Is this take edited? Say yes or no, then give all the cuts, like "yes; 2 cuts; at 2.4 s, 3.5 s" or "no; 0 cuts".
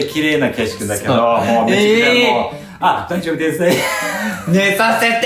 no; 0 cuts